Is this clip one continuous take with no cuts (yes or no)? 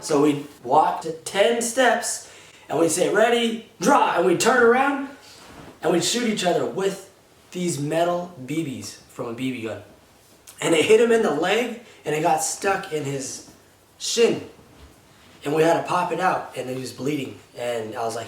no